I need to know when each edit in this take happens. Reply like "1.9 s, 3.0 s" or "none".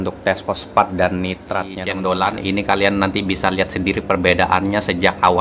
1.8 s